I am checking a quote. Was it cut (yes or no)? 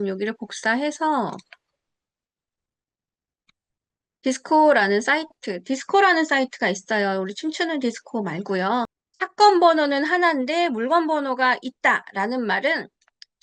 yes